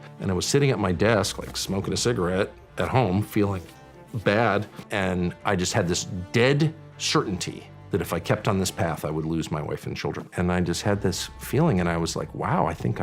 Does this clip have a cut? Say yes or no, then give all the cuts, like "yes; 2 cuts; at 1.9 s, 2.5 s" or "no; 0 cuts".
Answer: yes; 1 cut; at 10.3 s